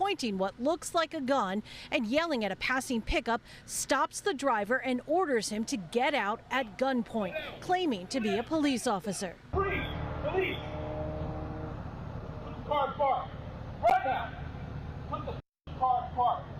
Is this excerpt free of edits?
yes; 0 cuts

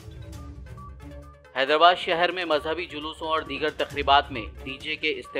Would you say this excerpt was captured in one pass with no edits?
no; 1 cut; at 1.1 s

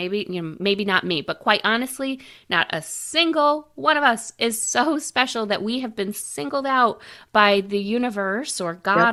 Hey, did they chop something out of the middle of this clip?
no; 0 cuts

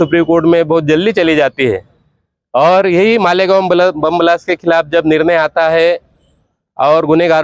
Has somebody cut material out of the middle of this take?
no; 0 cuts

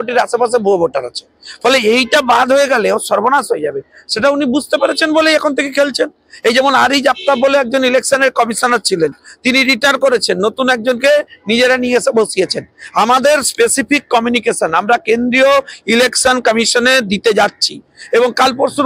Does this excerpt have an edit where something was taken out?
no; 0 cuts

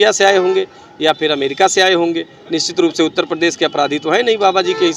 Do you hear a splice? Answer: no; 0 cuts

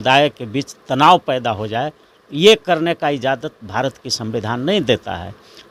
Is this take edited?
no; 0 cuts

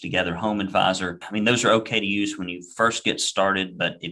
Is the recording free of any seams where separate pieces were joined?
no; 1 cut; at 1.2 s

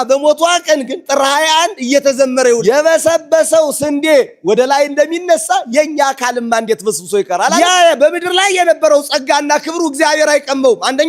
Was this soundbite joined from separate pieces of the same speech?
yes; 2 cuts; at 2.6 s, 7.6 s

